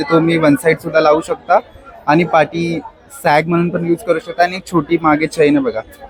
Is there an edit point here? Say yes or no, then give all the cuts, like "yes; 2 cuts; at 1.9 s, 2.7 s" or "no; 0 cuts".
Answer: no; 0 cuts